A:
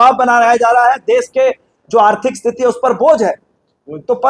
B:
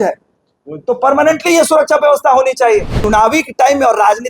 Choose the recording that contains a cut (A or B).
B